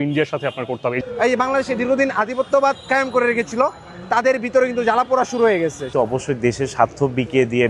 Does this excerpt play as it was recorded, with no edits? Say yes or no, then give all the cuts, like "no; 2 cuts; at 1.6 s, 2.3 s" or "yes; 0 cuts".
no; 2 cuts; at 1.0 s, 5.8 s